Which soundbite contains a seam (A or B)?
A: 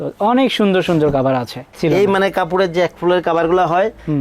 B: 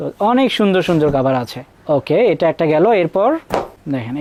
A